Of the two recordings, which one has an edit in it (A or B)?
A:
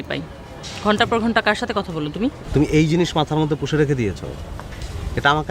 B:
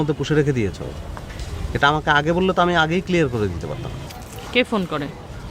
A